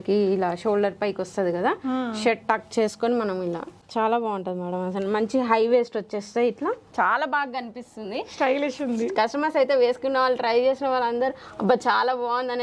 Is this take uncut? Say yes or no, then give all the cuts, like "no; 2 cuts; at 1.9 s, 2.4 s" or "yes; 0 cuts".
no; 1 cut; at 6.8 s